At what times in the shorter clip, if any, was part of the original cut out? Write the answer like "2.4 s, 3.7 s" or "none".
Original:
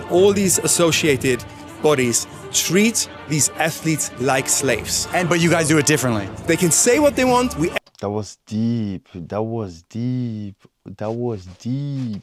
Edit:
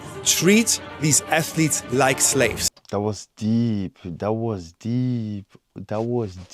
2.7 s